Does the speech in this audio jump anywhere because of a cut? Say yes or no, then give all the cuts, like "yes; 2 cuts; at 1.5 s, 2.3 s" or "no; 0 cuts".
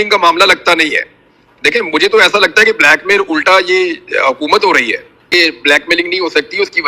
yes; 1 cut; at 5.3 s